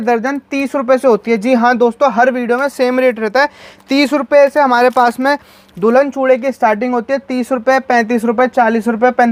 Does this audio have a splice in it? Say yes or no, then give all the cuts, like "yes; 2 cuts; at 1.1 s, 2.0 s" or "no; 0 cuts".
no; 0 cuts